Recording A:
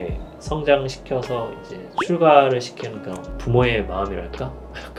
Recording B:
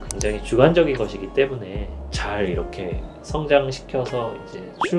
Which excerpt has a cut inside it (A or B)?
B